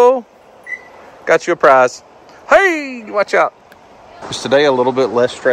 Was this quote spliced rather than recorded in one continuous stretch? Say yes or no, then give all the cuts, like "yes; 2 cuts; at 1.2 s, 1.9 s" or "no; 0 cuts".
yes; 1 cut; at 4.3 s